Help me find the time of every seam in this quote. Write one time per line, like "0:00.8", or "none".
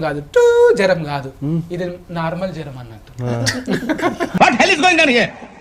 none